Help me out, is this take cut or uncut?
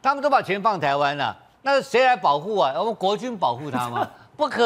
uncut